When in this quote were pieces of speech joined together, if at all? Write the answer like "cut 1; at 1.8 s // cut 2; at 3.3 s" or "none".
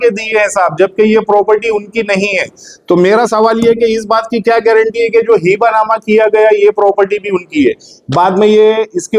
none